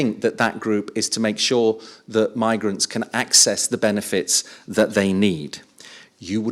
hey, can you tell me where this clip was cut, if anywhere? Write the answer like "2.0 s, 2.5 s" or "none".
none